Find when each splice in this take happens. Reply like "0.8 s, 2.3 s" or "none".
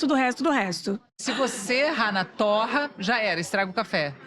1.1 s